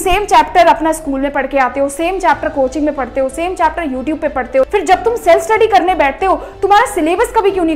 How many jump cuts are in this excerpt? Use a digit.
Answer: 1